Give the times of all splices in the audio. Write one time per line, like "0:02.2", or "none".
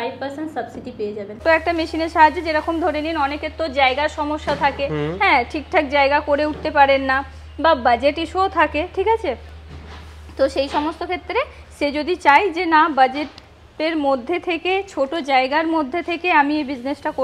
0:01.4